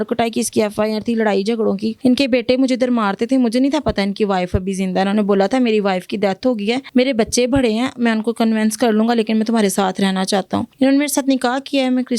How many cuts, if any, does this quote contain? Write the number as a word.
three